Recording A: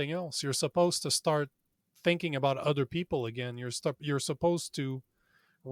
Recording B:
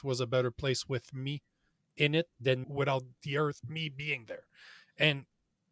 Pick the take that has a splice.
B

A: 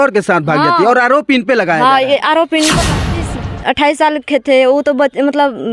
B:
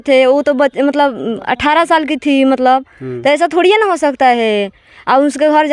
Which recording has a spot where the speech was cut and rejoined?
A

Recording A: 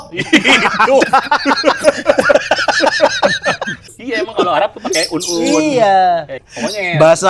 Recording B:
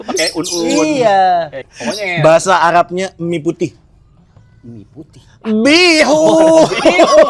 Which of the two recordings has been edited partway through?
A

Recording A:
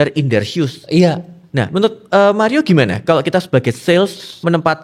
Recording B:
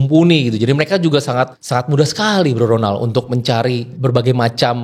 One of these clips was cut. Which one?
B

